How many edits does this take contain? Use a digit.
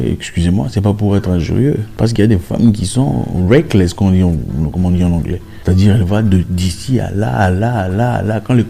2